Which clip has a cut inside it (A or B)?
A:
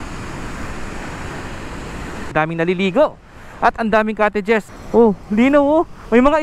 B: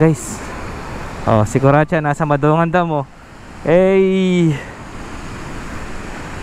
A